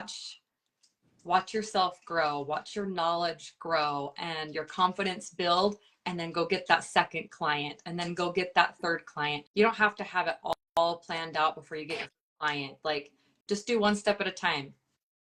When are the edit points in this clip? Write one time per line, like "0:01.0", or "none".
0:09.4